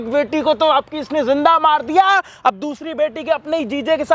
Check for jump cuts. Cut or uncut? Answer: uncut